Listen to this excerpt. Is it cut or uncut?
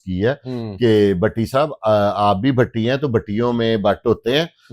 uncut